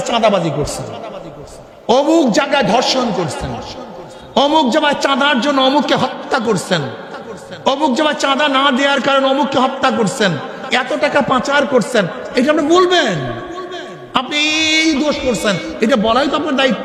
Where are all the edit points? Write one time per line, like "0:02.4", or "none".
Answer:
none